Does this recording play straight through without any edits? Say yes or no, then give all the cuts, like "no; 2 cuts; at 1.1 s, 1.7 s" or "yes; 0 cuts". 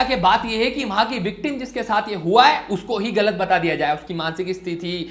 yes; 0 cuts